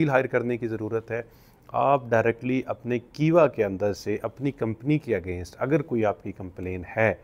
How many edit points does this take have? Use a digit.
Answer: 0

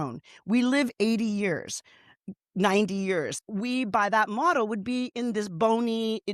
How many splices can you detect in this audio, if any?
1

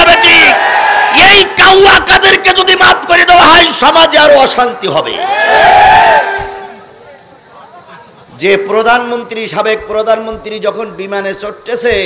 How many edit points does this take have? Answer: 0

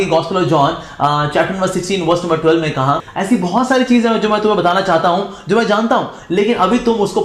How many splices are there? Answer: 1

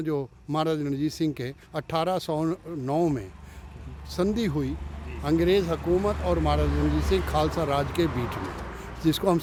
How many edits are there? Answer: 0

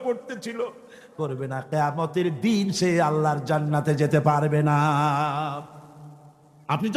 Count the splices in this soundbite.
1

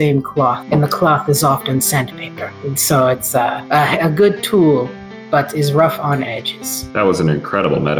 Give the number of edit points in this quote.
0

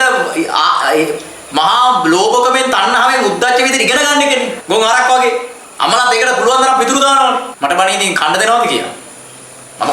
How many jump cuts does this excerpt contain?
3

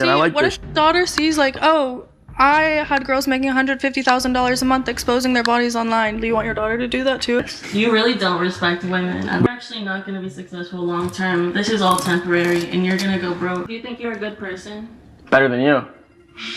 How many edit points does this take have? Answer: 3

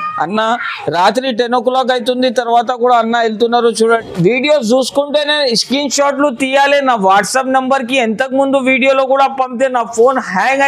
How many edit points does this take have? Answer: 1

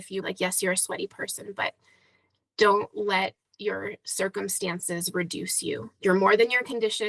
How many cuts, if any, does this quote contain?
0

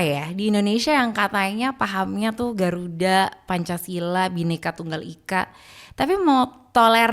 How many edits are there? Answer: 0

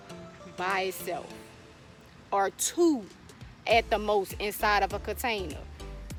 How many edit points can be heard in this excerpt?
0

